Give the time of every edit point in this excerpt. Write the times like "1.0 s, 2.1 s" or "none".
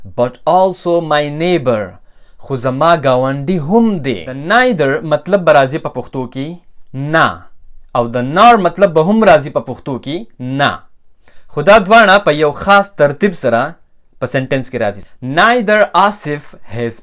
4.3 s, 15.0 s